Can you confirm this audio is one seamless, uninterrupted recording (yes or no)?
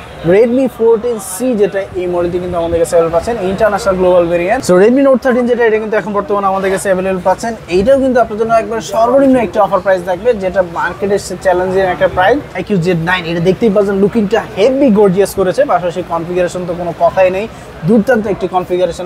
no